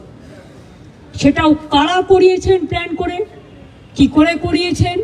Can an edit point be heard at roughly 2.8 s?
no; 0 cuts

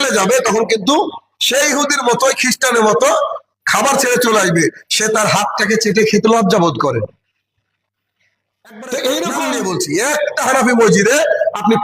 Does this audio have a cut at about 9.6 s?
yes; 1 cut; at 9.6 s

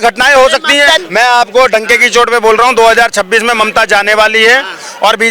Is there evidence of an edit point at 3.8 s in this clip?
no; 1 cut; at 1.0 s

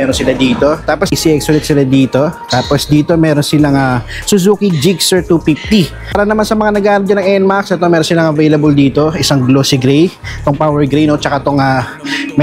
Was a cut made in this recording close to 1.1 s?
yes; 2 cuts; at 1.1 s, 6.2 s

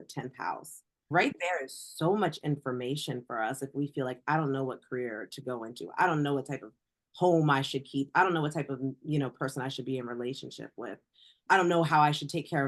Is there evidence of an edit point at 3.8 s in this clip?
no; 0 cuts

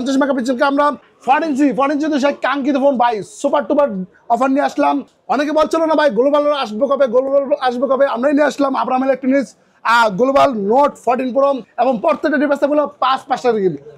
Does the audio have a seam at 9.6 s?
no; 3 cuts; at 1.0 s, 5.1 s, 11.7 s

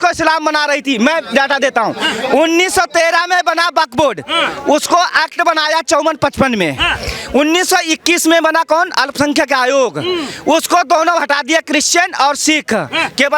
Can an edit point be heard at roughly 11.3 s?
no; 0 cuts

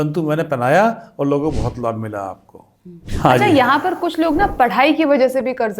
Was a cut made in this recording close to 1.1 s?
no; 1 cut; at 3.0 s

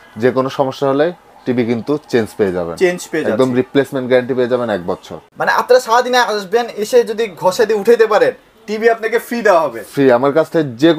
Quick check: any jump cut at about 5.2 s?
yes; 1 cut; at 5.2 s

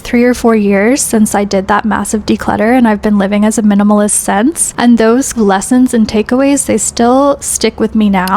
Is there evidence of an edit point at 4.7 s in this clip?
yes; 2 cuts; at 4.7 s, 5.3 s

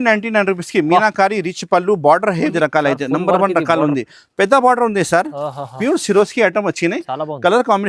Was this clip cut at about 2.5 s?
yes; 1 cut; at 2.5 s

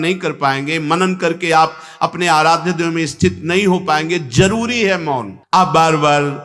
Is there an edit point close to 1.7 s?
no; 1 cut; at 5.3 s

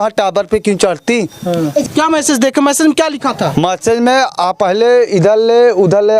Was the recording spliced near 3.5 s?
no; 1 cut; at 1.8 s

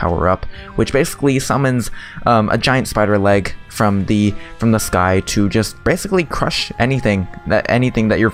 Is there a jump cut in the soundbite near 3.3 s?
no; 0 cuts

